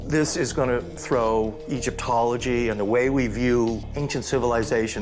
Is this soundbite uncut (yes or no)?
yes